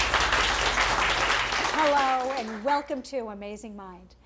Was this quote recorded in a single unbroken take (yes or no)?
yes